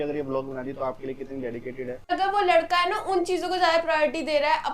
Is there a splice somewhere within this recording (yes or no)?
yes